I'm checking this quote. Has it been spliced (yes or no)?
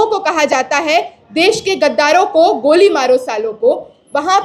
no